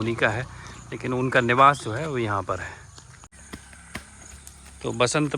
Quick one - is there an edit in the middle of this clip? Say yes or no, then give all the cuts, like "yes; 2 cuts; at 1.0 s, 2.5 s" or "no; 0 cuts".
yes; 1 cut; at 3.3 s